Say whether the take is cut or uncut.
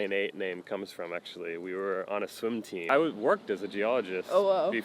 cut